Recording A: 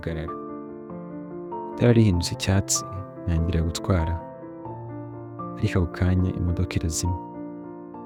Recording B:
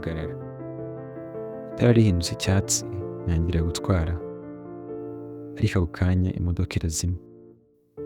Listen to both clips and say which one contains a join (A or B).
B